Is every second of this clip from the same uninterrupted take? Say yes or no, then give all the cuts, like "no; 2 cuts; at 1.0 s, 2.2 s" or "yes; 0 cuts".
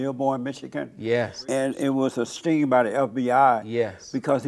no; 2 cuts; at 1.4 s, 2.4 s